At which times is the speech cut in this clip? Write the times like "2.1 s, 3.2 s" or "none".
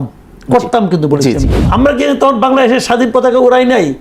1.6 s

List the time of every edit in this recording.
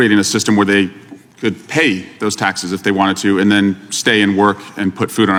none

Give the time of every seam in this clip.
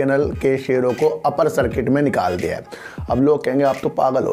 none

